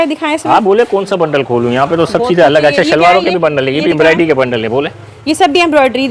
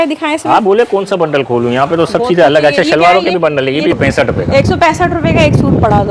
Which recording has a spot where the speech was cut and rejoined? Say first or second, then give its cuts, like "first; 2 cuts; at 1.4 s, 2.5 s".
second; 1 cut; at 4.0 s